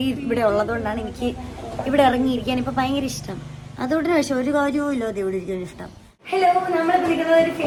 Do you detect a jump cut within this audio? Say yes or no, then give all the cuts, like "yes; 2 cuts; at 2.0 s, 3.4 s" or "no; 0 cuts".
no; 0 cuts